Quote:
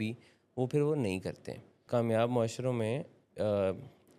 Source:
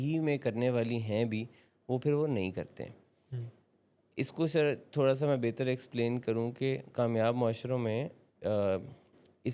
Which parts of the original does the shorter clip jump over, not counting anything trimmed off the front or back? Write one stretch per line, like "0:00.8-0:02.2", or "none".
0:03.1-0:06.9